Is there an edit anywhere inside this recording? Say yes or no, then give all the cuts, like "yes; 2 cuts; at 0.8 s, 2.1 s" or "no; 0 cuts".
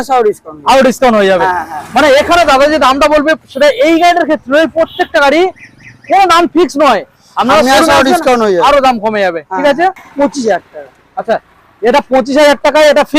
yes; 1 cut; at 10.0 s